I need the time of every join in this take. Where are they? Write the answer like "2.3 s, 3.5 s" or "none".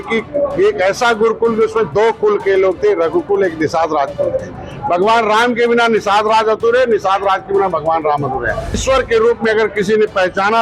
8.8 s